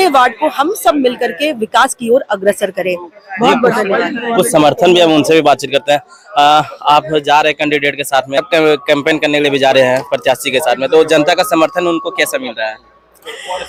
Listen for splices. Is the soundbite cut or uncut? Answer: uncut